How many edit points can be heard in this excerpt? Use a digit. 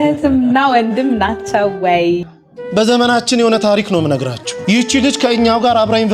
1